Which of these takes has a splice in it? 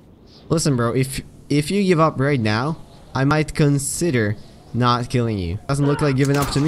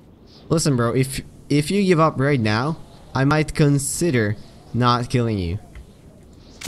first; 1 cut; at 5.7 s

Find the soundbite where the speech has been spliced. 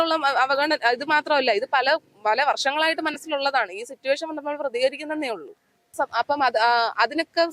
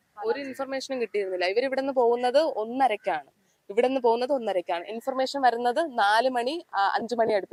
first; 1 cut; at 5.9 s

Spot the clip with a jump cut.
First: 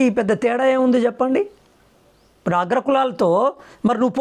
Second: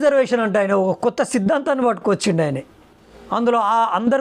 second; 1 cut; at 3.1 s

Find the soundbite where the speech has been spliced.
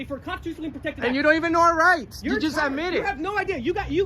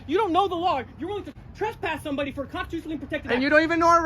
second; 1 cut; at 1.3 s

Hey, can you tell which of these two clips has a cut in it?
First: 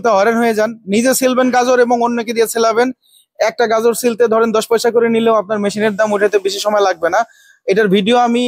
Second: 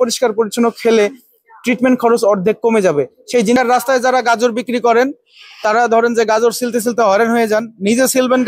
second; 1 cut; at 3.6 s

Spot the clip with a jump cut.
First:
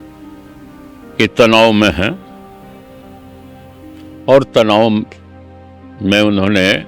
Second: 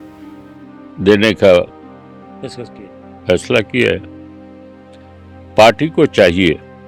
second; 1 cut; at 1.0 s

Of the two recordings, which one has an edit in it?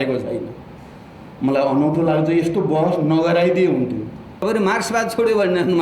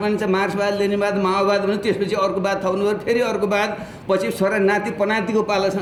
first; 1 cut; at 4.3 s

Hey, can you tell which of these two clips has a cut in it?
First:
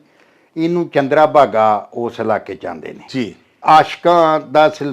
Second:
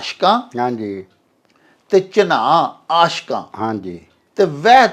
first; 1 cut; at 3.6 s

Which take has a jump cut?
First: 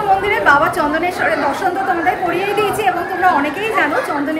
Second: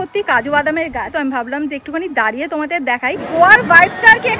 second; 2 cuts; at 1.1 s, 3.2 s

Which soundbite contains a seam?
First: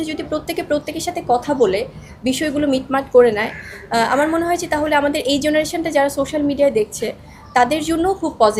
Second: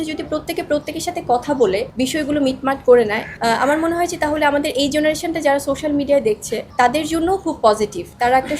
second; 3 cuts; at 1.9 s, 3.2 s, 6.6 s

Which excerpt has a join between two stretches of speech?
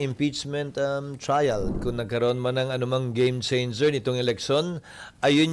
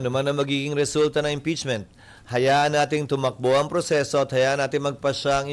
first; 1 cut; at 1.8 s

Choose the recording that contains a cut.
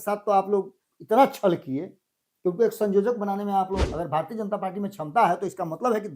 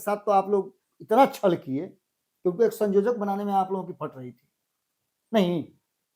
first; 1 cut; at 3.9 s

